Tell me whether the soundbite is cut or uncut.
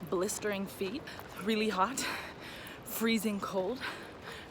cut